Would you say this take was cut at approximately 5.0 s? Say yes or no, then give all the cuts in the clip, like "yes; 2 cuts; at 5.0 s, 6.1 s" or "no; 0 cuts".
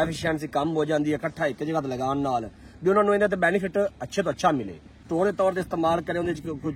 yes; 1 cut; at 5.0 s